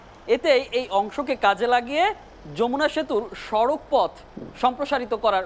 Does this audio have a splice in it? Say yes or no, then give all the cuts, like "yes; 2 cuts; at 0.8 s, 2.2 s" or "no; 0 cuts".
no; 0 cuts